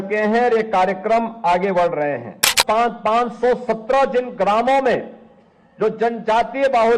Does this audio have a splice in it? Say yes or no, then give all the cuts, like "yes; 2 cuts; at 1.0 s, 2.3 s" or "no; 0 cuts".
yes; 1 cut; at 2.5 s